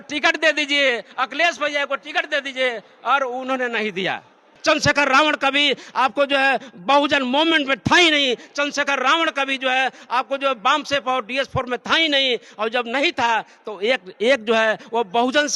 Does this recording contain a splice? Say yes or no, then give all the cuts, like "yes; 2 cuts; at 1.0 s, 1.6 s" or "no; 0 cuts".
yes; 1 cut; at 4.5 s